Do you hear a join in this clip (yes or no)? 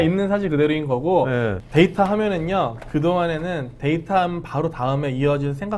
yes